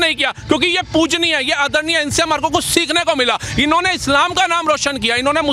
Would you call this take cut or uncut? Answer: uncut